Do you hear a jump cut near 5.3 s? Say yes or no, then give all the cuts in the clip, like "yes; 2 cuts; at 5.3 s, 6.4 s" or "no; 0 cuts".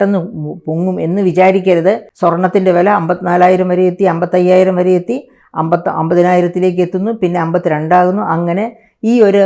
no; 1 cut; at 2.1 s